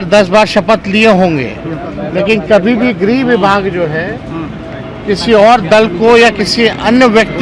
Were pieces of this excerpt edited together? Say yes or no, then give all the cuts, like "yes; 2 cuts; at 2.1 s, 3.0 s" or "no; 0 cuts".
no; 0 cuts